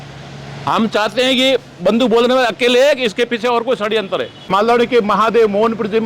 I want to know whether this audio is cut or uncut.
cut